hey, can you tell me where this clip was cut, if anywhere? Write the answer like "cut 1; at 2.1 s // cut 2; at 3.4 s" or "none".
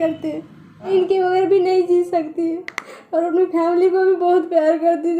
cut 1; at 0.9 s